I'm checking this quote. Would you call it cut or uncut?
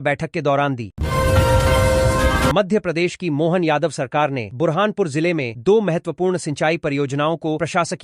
cut